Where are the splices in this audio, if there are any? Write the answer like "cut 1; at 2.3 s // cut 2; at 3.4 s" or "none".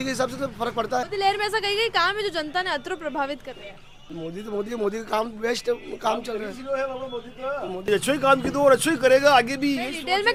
none